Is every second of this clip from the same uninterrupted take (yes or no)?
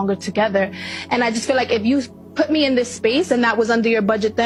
yes